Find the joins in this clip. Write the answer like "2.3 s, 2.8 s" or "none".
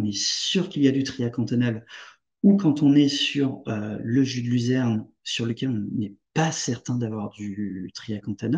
none